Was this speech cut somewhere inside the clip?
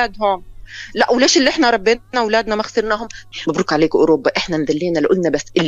yes; 1 cut; at 3.2 s

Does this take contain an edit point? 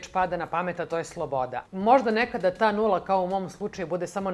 yes; 1 cut; at 1.6 s

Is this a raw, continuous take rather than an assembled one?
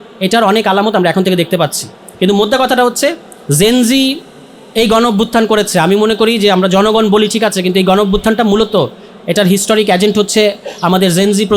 yes; 0 cuts

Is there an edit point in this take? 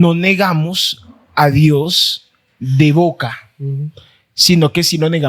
no; 0 cuts

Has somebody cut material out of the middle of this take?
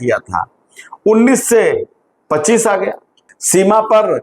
yes; 1 cut; at 3.1 s

